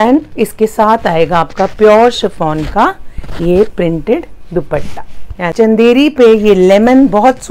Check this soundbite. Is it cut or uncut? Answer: cut